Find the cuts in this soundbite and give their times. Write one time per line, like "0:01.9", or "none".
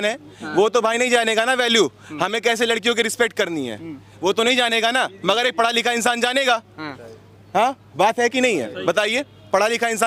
none